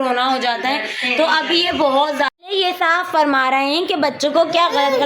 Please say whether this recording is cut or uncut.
cut